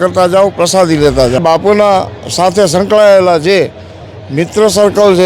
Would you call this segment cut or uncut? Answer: cut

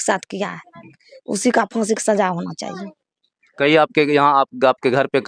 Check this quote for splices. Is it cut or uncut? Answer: uncut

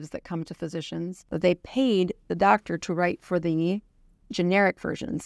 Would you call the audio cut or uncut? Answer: cut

